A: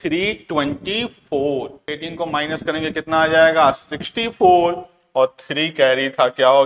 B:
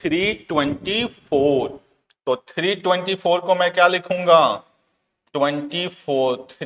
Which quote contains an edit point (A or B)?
A